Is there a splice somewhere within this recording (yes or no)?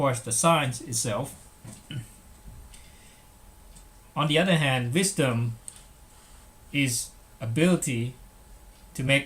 yes